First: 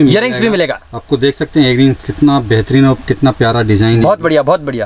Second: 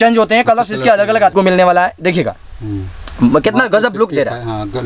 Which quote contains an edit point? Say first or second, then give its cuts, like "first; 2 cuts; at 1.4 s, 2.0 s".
second; 1 cut; at 1.3 s